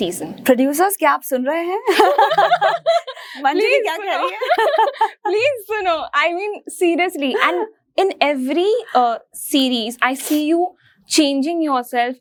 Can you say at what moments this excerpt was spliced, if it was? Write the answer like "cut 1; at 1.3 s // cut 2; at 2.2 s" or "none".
none